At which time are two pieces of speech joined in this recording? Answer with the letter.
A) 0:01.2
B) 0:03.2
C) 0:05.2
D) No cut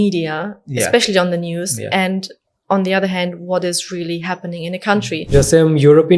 C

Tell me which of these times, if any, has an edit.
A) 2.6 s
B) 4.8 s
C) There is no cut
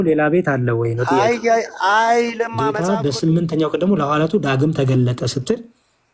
A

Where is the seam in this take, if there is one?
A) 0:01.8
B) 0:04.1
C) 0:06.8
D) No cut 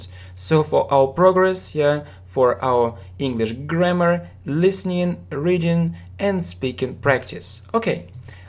B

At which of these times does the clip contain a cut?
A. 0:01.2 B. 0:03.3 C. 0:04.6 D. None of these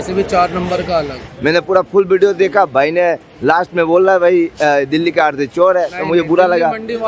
A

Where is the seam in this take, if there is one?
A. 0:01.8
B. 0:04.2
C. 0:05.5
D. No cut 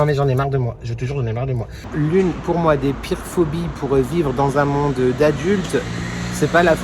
A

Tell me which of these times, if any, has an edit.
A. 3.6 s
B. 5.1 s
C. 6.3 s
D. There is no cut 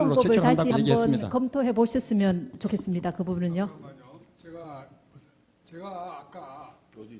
B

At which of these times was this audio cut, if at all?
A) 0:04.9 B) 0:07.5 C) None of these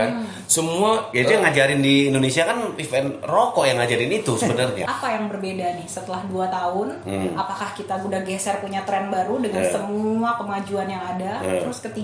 A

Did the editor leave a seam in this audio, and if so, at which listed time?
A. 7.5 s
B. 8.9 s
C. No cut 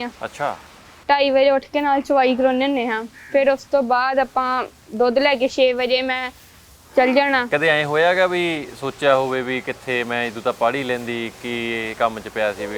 A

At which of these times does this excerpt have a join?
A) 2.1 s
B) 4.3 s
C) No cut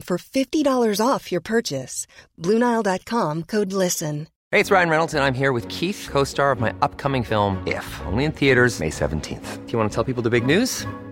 B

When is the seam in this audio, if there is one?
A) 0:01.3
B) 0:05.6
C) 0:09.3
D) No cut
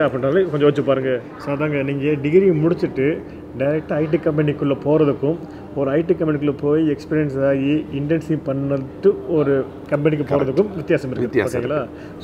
A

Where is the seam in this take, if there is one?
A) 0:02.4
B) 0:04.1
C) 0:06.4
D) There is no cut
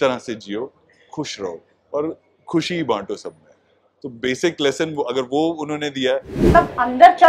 C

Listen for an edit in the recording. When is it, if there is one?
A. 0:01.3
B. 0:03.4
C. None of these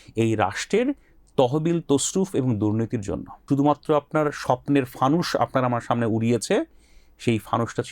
B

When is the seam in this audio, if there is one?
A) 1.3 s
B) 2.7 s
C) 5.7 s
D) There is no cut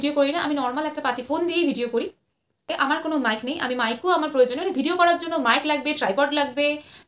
B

